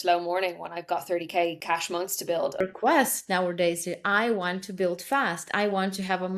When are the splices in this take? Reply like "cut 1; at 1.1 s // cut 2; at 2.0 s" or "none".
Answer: cut 1; at 1.6 s // cut 2; at 2.5 s